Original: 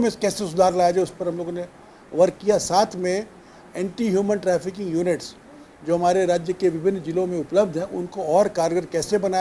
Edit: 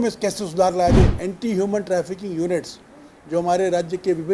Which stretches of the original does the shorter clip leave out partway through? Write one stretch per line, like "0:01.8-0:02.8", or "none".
0:01.1-0:03.7